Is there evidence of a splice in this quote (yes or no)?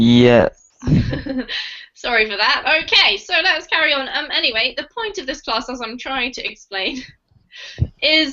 yes